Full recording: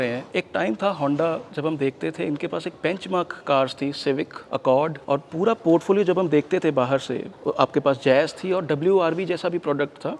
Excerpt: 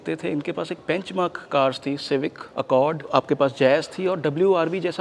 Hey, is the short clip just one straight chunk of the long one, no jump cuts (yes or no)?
no